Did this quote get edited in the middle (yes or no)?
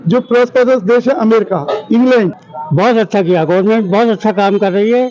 yes